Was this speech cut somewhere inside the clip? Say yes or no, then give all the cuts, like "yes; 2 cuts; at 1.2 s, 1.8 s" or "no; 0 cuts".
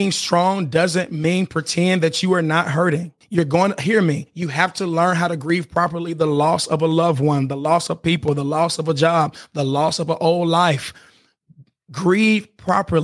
yes; 1 cut; at 3.2 s